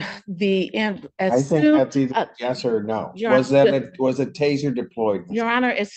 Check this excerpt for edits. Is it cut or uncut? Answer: uncut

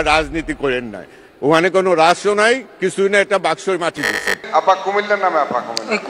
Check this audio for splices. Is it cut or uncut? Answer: cut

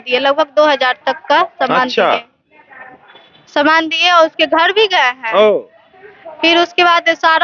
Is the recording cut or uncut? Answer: uncut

